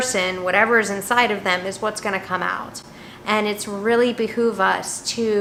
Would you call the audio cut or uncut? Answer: uncut